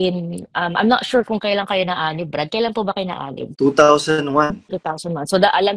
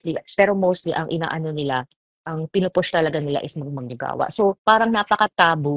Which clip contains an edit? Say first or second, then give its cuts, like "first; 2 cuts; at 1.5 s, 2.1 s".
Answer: first; 2 cuts; at 3.4 s, 4.8 s